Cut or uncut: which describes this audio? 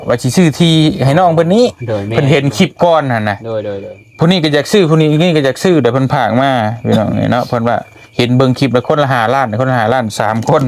uncut